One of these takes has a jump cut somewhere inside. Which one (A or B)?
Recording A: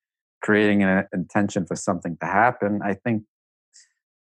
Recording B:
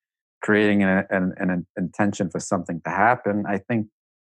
A